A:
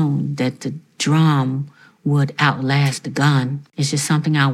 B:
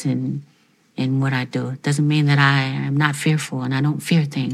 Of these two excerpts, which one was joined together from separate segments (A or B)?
A